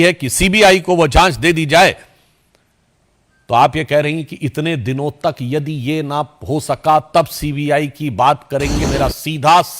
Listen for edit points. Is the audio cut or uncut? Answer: cut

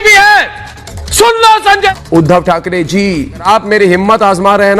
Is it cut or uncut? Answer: cut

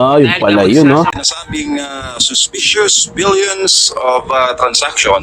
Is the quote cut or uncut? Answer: cut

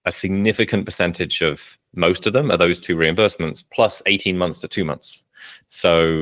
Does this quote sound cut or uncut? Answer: uncut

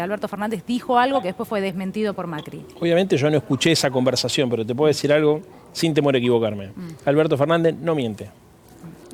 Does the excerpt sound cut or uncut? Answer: uncut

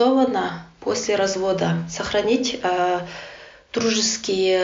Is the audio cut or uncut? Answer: uncut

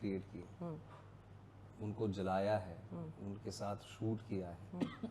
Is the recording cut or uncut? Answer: uncut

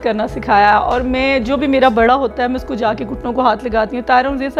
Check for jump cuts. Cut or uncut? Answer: uncut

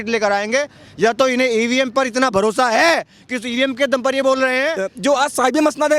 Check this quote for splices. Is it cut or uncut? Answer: cut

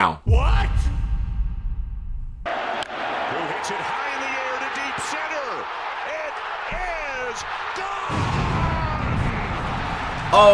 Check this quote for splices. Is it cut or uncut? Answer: cut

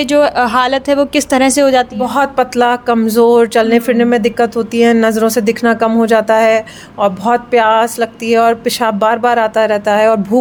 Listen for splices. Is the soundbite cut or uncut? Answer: uncut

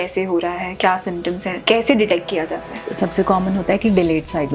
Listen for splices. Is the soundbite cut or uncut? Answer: cut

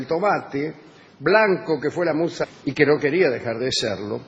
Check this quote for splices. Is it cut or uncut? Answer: uncut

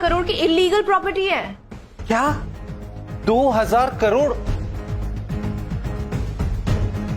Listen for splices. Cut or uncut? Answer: uncut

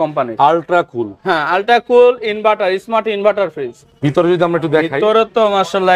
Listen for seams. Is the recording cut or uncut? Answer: cut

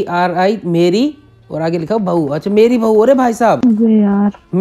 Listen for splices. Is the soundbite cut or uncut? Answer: cut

